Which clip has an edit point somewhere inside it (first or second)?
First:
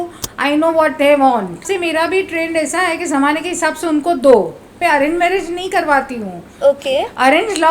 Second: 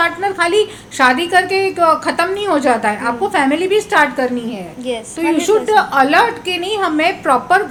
first